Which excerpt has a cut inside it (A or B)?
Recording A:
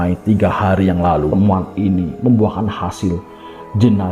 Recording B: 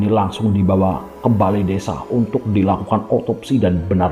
A